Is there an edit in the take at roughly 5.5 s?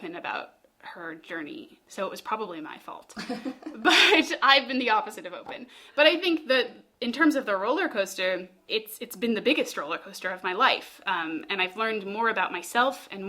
no; 2 cuts; at 1.8 s, 8.6 s

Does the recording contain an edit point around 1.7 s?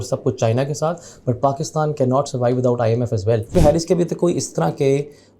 no; 1 cut; at 3.5 s

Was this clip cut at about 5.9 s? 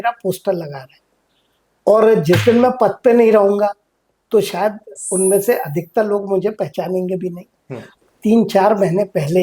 no; 1 cut; at 8.0 s

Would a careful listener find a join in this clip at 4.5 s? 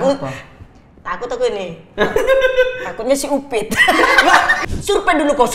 yes; 1 cut; at 4.5 s

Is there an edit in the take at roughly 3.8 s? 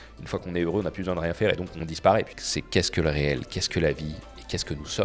no; 2 cuts; at 1.8 s, 2.4 s

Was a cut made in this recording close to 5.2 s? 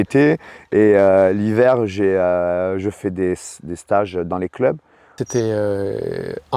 yes; 1 cut; at 5.2 s

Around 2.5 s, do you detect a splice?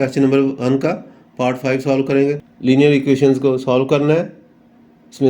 yes; 1 cut; at 2.5 s

